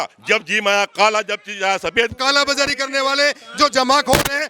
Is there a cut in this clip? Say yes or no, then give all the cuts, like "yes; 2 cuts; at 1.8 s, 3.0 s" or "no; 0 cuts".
yes; 1 cut; at 2.1 s